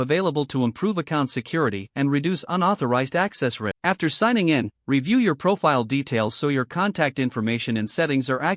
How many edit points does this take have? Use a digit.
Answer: 1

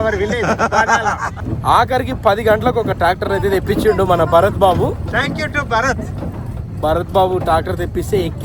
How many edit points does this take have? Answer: 1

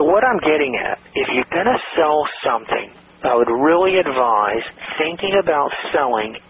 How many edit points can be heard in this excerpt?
0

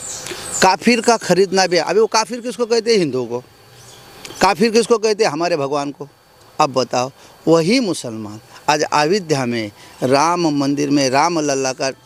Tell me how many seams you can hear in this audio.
0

